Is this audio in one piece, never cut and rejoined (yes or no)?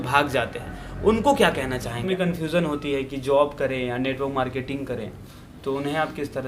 no